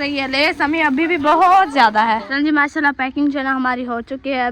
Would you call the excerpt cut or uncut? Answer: cut